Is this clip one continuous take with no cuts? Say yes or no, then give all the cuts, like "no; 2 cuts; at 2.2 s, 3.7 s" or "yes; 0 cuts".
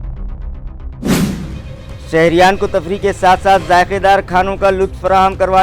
no; 1 cut; at 1.6 s